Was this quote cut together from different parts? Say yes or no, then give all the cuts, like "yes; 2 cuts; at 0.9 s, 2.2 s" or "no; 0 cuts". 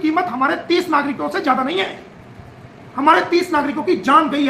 no; 0 cuts